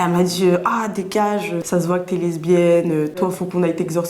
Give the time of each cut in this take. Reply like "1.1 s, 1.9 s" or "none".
1.6 s, 3.1 s